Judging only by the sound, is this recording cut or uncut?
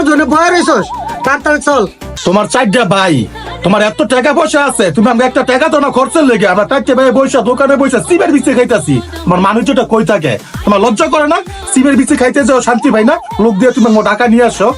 cut